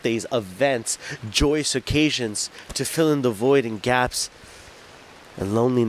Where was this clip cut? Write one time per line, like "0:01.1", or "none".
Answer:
none